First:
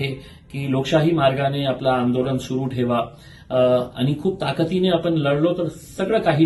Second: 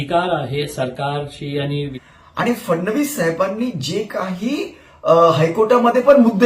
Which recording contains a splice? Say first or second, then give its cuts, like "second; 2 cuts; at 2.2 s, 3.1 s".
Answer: second; 1 cut; at 1.9 s